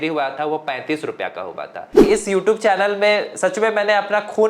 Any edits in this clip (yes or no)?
yes